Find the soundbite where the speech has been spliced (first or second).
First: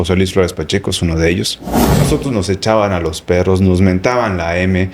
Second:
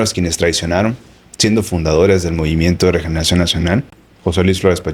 first